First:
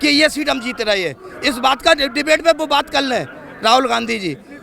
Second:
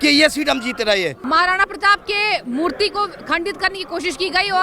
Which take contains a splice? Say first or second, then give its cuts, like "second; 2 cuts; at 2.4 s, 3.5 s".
second; 1 cut; at 1.2 s